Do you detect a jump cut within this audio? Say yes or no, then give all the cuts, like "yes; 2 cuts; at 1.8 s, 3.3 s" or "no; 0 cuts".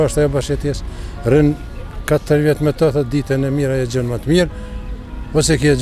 no; 0 cuts